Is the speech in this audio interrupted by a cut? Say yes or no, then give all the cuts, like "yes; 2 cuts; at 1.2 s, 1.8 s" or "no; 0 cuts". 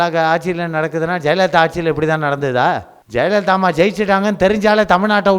yes; 1 cut; at 2.9 s